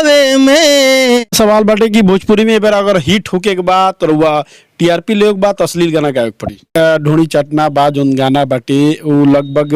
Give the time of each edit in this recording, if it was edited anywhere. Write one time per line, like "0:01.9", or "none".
0:01.3
0:06.7